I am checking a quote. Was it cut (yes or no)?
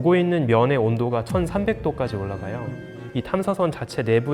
yes